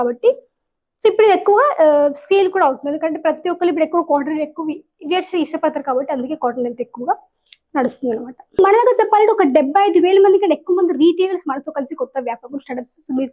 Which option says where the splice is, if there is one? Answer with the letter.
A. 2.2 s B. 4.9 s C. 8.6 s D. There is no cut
C